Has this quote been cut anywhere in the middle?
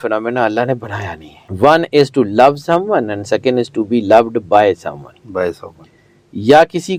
no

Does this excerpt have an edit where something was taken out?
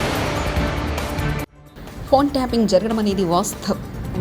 yes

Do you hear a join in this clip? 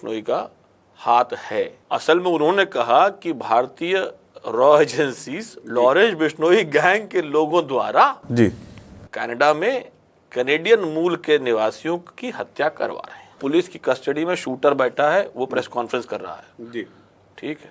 yes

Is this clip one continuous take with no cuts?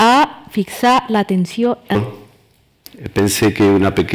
yes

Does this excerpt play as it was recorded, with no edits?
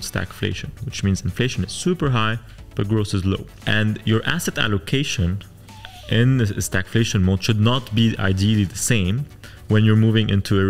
no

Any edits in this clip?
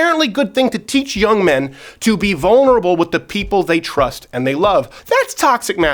yes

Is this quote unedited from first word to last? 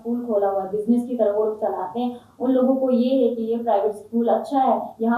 yes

